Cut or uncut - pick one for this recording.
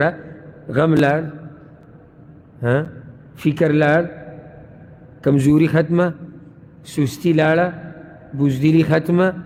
uncut